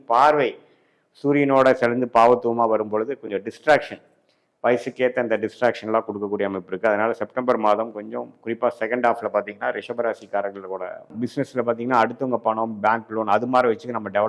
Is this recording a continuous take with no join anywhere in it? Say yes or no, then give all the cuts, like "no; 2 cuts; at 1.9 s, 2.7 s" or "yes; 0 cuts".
no; 1 cut; at 11.2 s